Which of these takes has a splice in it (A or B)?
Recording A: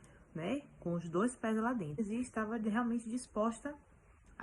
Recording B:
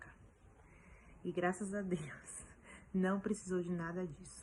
A